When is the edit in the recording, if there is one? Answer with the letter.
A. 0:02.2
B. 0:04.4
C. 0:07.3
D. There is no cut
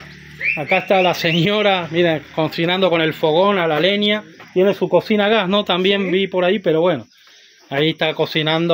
D